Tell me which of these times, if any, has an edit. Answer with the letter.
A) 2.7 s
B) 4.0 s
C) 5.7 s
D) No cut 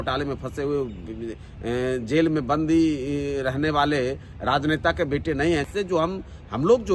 C